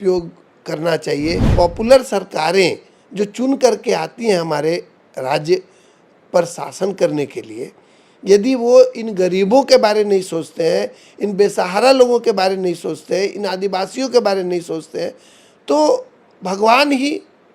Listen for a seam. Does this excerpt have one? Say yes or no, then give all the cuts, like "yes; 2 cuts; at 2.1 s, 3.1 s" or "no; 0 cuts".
yes; 1 cut; at 1.5 s